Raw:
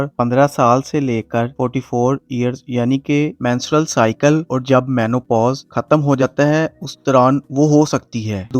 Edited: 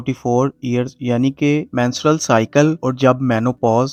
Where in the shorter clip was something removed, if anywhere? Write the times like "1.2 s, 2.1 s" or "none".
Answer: none